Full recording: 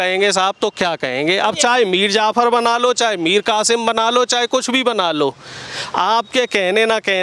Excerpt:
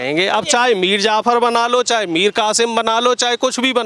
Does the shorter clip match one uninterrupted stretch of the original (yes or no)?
yes